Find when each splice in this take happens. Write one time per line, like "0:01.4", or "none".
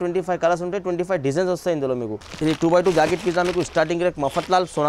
0:02.2